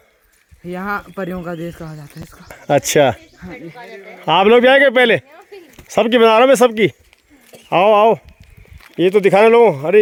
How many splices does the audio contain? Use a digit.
0